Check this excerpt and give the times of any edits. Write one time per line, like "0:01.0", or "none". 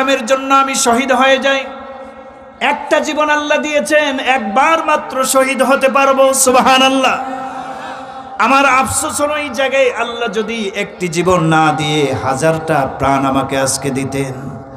none